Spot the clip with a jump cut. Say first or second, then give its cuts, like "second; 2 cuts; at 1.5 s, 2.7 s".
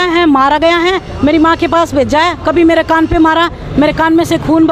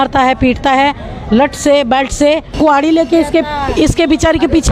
second; 1 cut; at 2.5 s